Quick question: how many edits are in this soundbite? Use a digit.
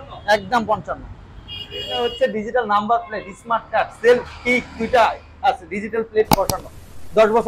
1